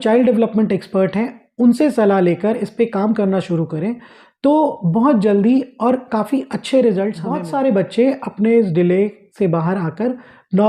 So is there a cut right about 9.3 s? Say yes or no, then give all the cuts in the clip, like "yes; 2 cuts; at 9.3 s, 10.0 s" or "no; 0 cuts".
no; 1 cut; at 7.4 s